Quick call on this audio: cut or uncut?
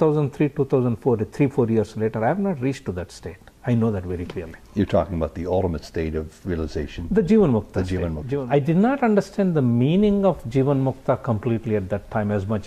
cut